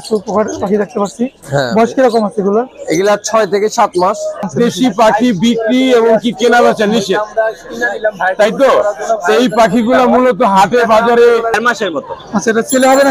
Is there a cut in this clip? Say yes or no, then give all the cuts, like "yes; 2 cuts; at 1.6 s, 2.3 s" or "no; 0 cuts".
yes; 2 cuts; at 4.5 s, 11.6 s